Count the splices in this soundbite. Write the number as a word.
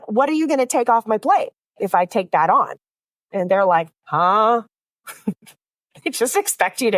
zero